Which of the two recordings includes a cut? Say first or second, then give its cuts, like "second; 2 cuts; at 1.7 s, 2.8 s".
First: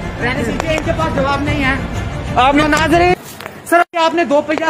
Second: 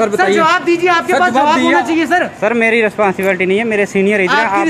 first; 1 cut; at 3.2 s